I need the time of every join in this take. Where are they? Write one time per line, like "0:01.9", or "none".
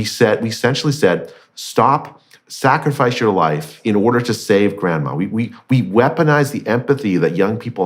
0:03.7